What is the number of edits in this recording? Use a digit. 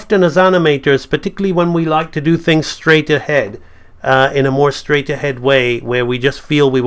0